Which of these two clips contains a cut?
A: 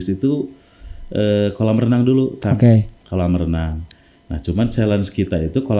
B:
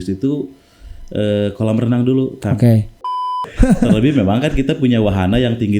B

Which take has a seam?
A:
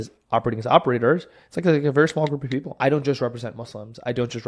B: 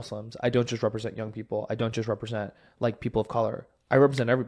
A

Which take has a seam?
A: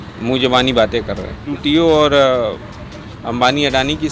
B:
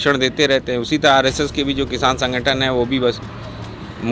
A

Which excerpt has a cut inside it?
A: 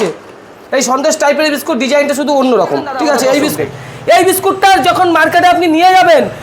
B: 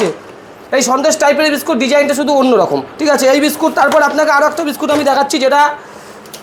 A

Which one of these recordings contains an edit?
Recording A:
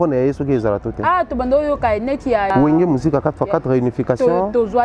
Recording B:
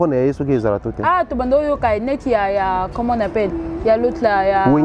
A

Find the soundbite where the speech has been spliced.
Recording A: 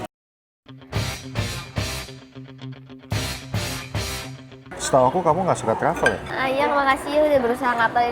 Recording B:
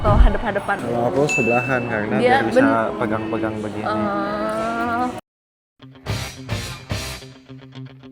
A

